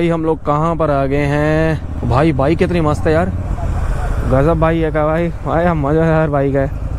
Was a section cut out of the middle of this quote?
no; 0 cuts

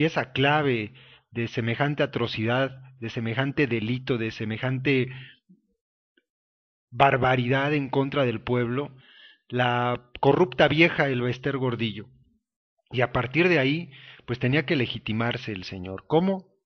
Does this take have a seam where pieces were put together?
no; 0 cuts

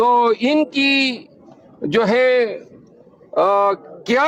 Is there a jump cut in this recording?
no; 0 cuts

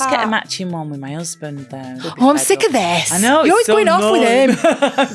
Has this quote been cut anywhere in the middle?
yes; 1 cut; at 2.0 s

